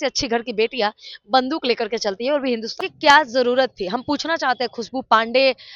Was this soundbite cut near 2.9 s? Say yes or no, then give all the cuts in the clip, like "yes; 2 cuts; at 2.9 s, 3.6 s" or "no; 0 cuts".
yes; 1 cut; at 2.9 s